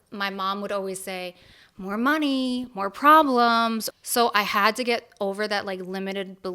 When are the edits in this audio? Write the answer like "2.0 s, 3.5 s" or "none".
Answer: 3.9 s